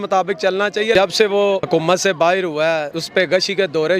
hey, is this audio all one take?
no; 3 cuts; at 0.9 s, 1.6 s, 3.0 s

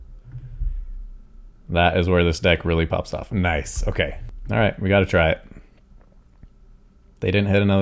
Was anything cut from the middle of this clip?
yes; 1 cut; at 4.3 s

